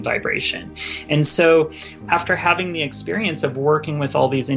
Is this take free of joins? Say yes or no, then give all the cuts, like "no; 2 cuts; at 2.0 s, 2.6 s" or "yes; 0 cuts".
no; 1 cut; at 2.0 s